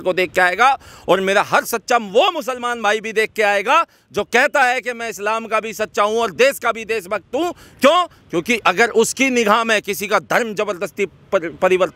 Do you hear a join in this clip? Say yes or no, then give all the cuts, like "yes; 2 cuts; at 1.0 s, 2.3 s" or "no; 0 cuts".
no; 0 cuts